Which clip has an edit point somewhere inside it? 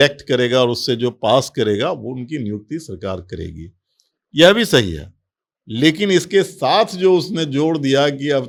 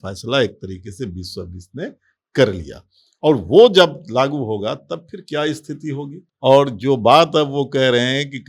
second; 1 cut; at 6.2 s

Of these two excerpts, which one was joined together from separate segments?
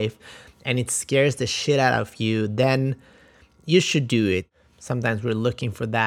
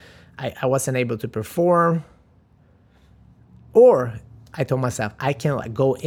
first; 1 cut; at 4.5 s

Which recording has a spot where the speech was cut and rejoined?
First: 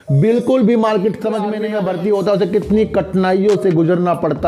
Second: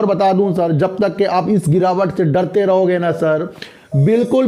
first; 1 cut; at 1.6 s

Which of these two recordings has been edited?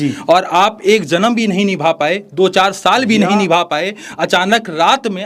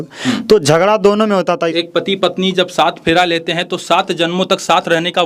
second; 1 cut; at 1.7 s

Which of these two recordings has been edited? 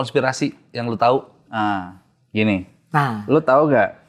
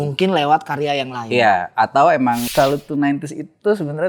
second; 1 cut; at 2.5 s

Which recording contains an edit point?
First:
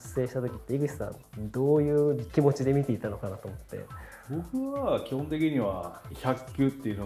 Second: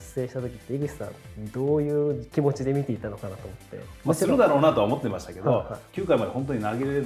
second; 1 cut; at 3.9 s

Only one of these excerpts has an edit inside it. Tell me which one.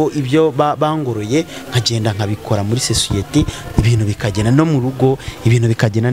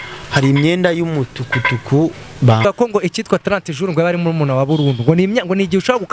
second; 1 cut; at 2.6 s

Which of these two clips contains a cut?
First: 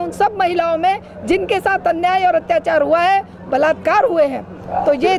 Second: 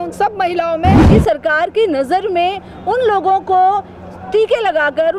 second; 1 cut; at 1.0 s

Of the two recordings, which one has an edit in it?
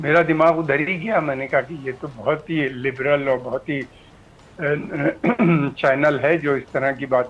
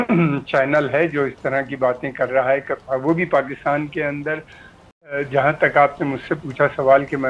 second; 1 cut; at 5.2 s

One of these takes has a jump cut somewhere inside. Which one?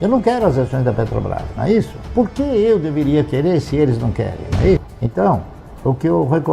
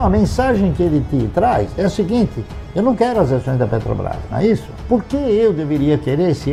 first; 1 cut; at 5.0 s

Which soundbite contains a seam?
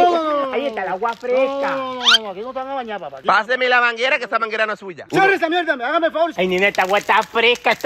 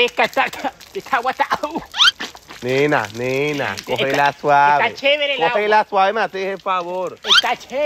first; 2 cuts; at 3.2 s, 6.3 s

